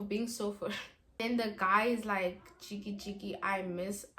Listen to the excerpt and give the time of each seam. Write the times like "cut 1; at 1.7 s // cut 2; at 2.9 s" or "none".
cut 1; at 1.2 s

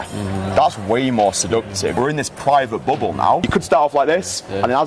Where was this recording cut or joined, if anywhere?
cut 1; at 1.9 s // cut 2; at 3.5 s

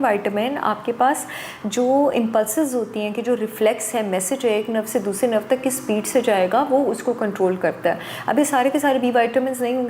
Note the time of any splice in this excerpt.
none

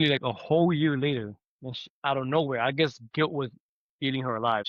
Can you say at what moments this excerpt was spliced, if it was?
none

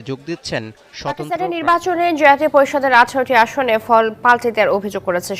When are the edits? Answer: cut 1; at 1.2 s

